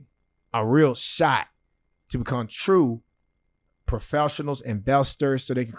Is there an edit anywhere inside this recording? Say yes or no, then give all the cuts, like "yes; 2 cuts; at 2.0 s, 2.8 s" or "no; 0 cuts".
no; 0 cuts